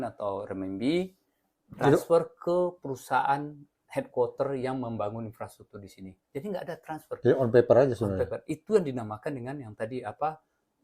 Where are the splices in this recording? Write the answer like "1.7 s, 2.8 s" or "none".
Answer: none